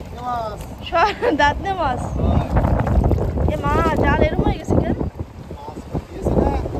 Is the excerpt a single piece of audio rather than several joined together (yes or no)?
yes